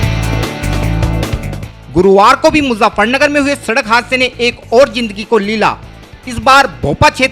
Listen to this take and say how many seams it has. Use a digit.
1